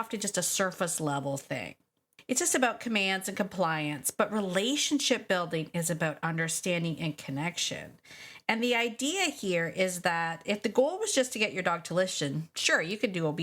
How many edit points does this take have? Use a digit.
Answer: 1